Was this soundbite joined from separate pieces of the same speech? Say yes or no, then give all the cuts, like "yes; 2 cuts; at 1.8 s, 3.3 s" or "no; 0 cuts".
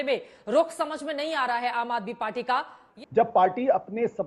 yes; 1 cut; at 2.9 s